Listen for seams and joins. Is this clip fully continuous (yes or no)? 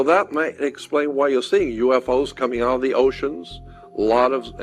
yes